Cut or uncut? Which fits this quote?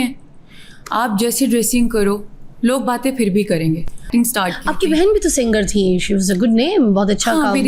cut